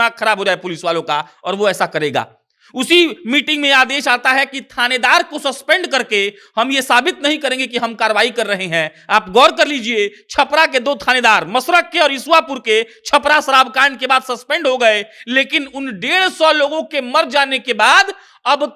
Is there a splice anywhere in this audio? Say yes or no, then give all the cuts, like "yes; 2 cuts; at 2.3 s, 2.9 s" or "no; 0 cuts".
no; 0 cuts